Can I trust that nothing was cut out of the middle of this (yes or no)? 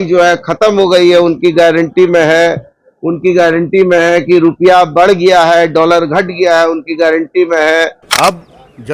no